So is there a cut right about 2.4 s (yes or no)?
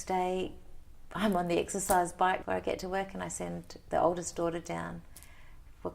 yes